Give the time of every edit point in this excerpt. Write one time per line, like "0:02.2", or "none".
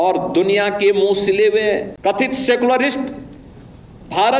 0:01.9